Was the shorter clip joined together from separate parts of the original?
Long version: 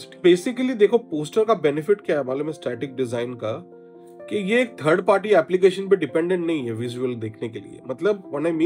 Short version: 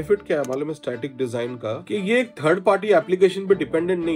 yes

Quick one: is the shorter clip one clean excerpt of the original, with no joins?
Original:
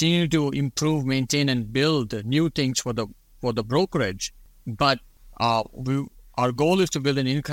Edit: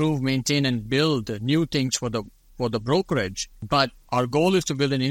no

